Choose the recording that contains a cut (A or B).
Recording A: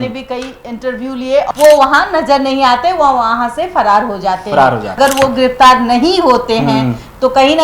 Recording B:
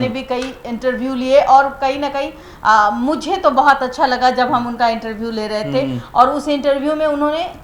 A